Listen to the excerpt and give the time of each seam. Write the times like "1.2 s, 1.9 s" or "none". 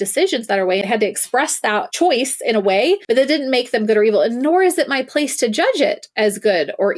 0.8 s, 1.9 s, 3.0 s